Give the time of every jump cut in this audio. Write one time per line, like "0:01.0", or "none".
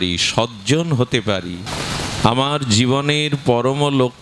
0:01.7